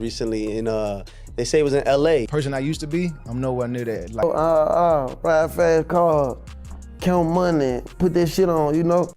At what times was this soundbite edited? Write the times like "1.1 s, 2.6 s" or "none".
2.3 s, 4.2 s